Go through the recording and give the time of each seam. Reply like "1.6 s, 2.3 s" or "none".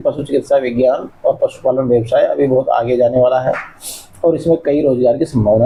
none